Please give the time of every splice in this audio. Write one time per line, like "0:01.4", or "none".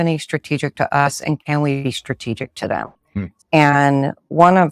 0:03.3